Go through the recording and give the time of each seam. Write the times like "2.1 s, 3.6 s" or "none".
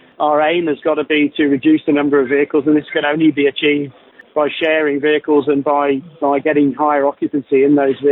4.2 s